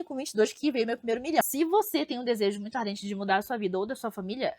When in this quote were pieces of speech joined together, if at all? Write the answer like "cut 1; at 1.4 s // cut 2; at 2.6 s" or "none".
cut 1; at 1.4 s